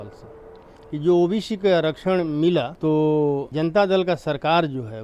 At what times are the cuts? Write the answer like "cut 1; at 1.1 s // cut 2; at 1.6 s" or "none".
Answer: cut 1; at 2.7 s // cut 2; at 3.5 s